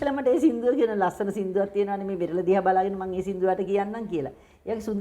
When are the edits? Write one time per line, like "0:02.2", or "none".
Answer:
none